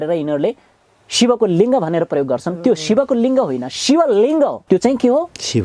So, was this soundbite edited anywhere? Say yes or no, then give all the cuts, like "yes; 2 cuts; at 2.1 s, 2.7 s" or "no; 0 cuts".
yes; 1 cut; at 4.6 s